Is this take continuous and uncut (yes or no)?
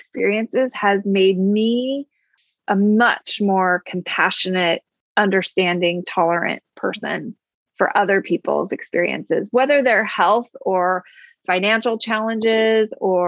yes